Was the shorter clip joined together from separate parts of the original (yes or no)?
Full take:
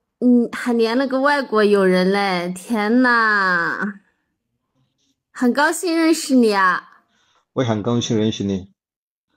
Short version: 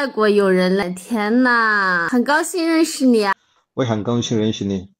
yes